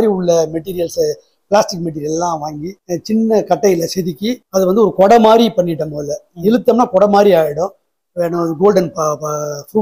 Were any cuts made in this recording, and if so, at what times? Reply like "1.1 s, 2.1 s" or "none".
7.9 s